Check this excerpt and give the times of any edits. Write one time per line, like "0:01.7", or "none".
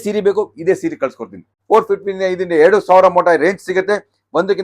0:01.5